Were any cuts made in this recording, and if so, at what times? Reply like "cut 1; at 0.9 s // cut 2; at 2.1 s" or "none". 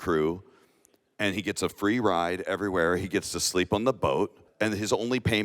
cut 1; at 4.4 s